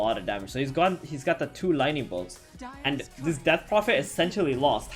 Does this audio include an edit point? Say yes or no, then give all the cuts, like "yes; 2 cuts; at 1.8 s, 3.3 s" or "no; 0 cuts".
no; 0 cuts